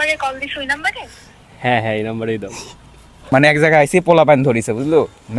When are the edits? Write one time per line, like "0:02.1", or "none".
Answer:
0:03.1